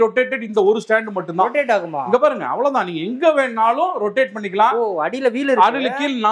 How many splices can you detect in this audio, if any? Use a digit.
0